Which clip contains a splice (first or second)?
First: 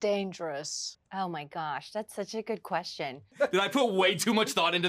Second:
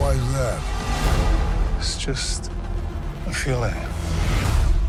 first